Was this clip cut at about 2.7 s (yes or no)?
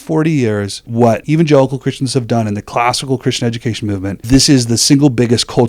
no